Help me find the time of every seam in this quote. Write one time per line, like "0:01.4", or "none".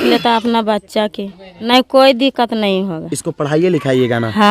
0:01.6